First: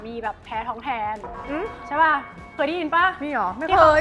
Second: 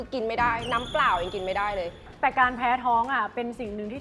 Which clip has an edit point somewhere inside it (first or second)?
second